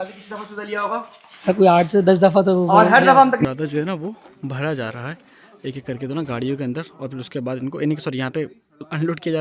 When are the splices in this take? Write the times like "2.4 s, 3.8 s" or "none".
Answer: 3.4 s

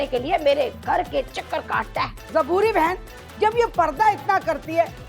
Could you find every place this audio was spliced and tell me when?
none

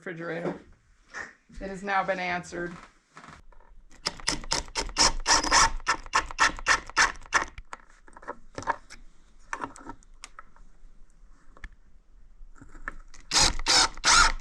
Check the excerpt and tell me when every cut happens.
none

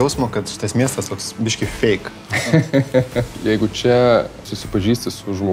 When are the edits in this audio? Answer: 3.3 s, 4.6 s

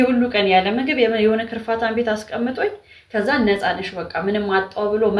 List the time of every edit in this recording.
none

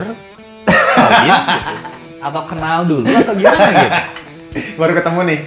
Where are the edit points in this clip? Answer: none

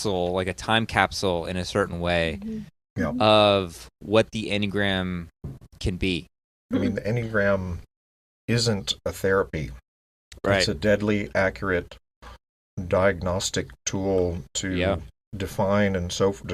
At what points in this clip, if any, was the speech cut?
6.7 s, 15.4 s

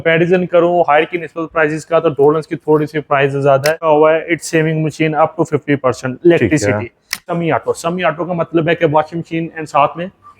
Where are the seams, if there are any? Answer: 3.8 s, 7.3 s

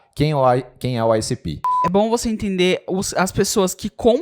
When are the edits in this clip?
1.8 s

